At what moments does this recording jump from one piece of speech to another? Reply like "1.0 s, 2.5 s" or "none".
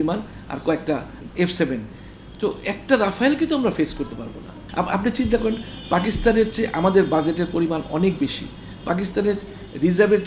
1.2 s, 4.6 s

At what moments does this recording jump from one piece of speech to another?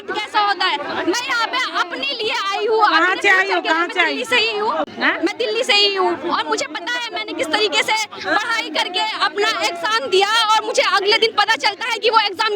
none

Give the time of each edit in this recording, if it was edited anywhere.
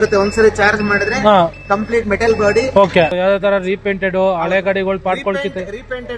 3.1 s

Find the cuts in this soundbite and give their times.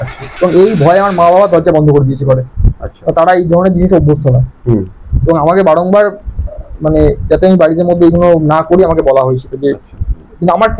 none

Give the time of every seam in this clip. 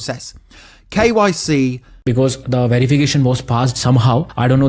1.9 s

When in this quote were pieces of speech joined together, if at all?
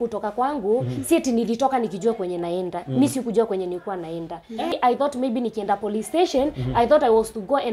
4.7 s

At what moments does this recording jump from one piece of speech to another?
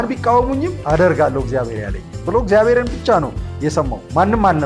none

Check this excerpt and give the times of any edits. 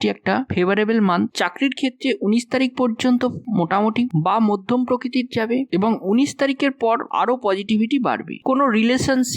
1.3 s, 8.4 s

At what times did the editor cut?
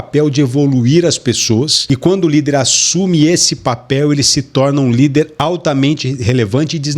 1.8 s, 5.3 s

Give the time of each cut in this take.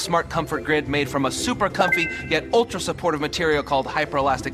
none

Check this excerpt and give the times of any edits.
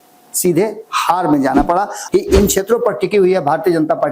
2.0 s

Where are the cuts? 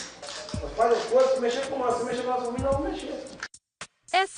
3.3 s

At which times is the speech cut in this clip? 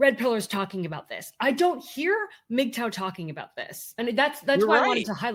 none

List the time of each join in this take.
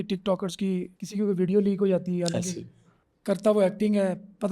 1.0 s

